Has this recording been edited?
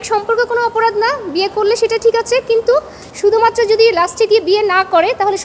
no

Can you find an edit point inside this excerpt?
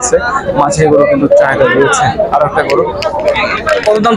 no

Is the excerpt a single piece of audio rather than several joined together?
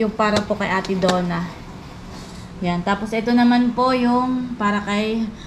yes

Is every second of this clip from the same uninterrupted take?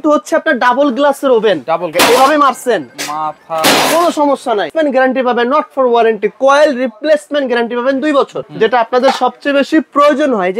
no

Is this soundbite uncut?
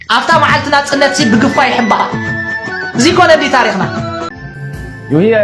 no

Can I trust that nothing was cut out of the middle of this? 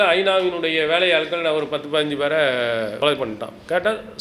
no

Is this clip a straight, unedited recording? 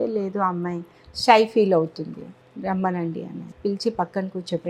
no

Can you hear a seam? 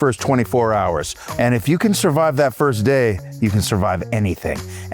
yes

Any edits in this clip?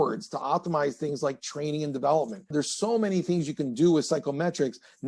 no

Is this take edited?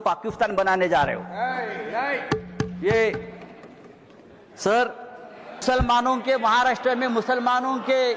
yes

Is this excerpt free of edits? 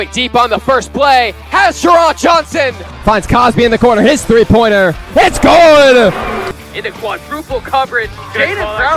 no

